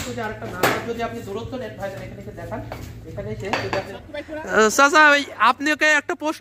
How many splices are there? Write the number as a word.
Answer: one